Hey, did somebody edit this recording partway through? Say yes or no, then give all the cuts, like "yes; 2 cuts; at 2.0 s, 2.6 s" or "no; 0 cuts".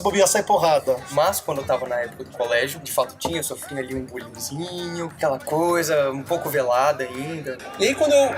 yes; 4 cuts; at 1.1 s, 2.8 s, 5.1 s, 7.5 s